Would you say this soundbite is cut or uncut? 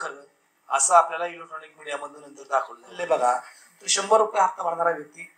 cut